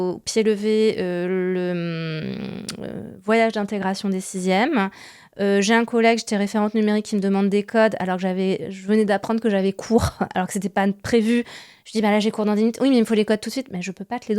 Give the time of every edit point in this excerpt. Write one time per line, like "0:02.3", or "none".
none